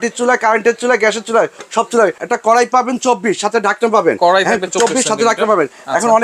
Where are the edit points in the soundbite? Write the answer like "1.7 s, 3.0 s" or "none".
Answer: 2.2 s